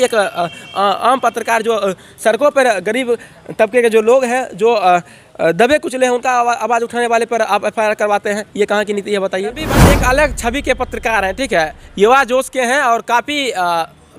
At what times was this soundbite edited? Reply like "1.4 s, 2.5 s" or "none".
9.8 s